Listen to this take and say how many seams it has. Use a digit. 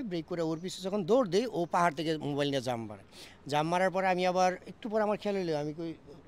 0